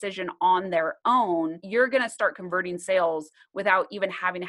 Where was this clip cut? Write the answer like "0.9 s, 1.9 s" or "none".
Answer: 1.6 s